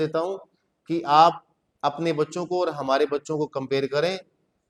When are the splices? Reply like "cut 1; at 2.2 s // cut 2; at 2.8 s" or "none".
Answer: none